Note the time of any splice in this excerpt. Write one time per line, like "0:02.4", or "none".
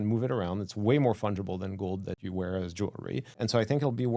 0:02.2
0:03.3